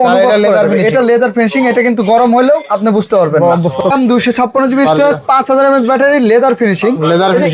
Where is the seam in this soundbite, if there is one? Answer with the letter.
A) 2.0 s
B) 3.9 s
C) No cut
B